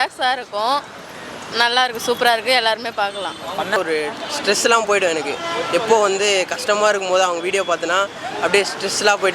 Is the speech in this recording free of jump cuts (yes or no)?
no